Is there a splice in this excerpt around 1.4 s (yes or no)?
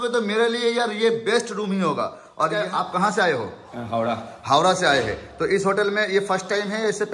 no